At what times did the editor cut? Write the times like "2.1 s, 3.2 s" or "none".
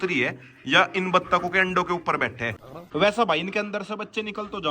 2.6 s

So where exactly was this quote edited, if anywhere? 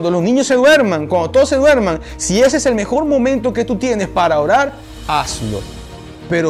none

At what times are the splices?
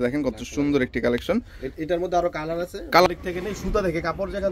3.1 s

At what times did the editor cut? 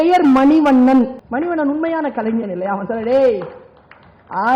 1.2 s

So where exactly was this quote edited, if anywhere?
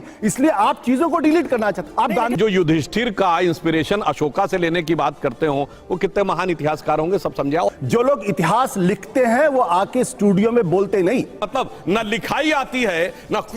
2.3 s, 7.7 s, 11.4 s

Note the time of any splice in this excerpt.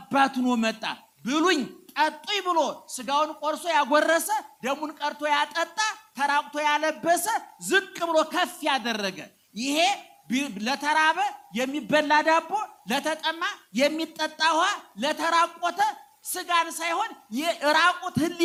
none

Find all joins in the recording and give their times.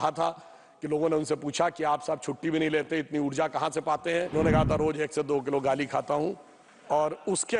4.3 s

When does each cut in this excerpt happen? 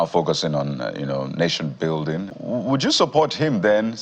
2.4 s

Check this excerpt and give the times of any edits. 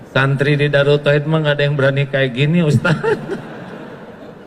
none

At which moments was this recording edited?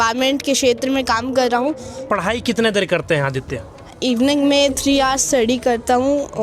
2.0 s, 3.9 s

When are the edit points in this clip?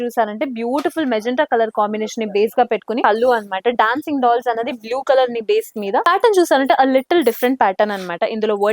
3.0 s, 6.0 s

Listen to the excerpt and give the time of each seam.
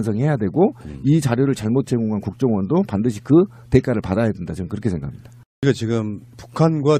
5.0 s

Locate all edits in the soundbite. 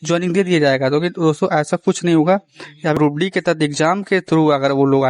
3.0 s

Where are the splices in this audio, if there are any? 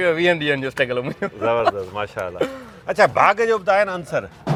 none

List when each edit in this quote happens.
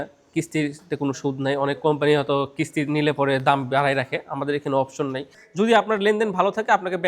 5.4 s

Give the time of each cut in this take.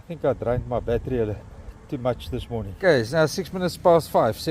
2.7 s

